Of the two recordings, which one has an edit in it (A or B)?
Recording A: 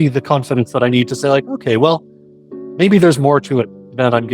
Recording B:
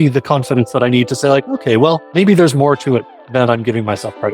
B